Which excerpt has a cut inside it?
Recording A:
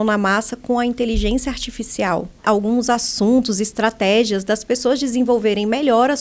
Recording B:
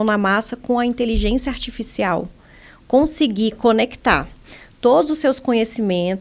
A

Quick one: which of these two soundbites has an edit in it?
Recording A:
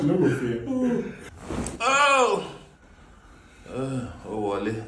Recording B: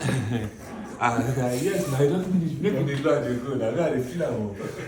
A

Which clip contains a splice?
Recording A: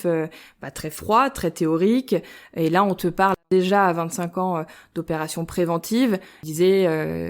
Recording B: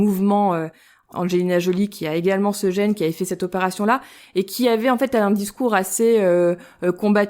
A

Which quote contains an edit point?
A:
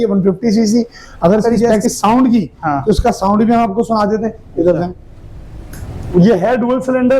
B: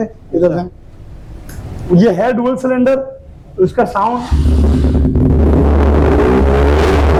A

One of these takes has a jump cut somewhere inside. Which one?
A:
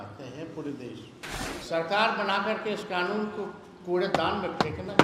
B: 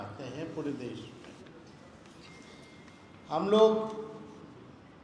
A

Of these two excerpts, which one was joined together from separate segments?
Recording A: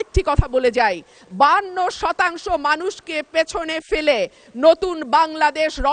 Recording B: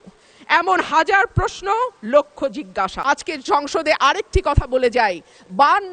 B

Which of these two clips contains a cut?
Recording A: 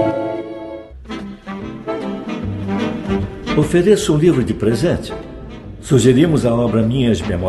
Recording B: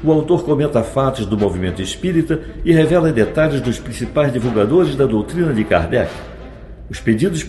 A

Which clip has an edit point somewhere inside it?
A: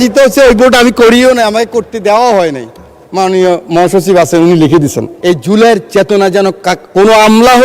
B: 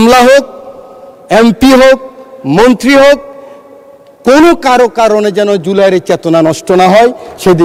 A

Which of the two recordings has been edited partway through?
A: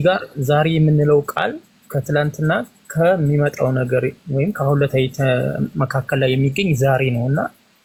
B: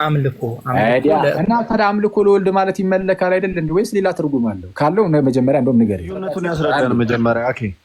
B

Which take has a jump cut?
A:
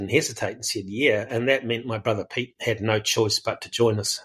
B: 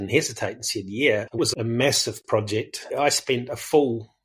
B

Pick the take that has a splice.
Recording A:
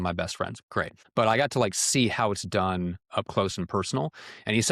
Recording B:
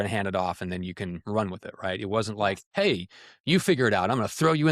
A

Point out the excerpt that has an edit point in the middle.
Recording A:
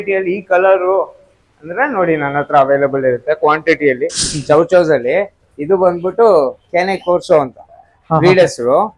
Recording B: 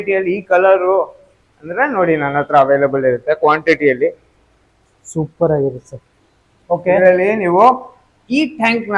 A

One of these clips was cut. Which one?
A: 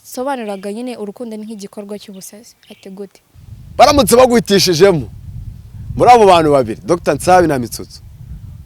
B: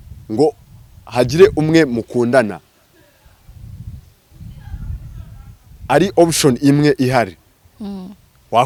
A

